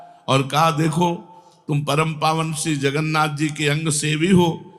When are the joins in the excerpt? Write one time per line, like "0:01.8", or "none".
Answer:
none